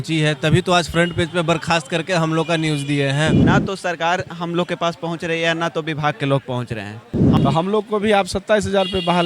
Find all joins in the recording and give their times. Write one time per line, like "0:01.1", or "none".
0:03.4
0:07.2